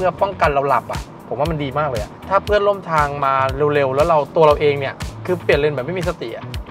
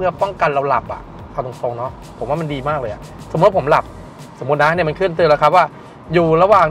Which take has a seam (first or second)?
first